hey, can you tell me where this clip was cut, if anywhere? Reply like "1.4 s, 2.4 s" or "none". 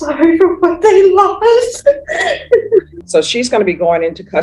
3.0 s